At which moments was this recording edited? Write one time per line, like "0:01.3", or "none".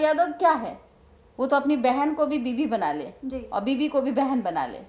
none